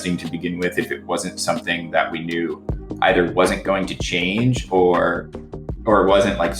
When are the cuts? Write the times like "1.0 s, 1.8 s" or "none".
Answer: none